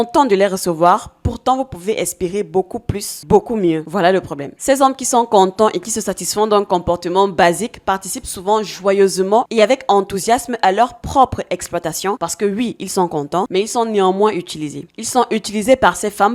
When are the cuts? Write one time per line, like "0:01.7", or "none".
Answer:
none